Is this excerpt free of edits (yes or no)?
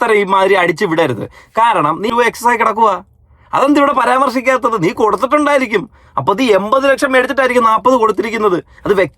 no